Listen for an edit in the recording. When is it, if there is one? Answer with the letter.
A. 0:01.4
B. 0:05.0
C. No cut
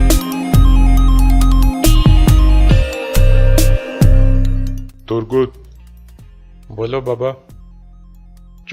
A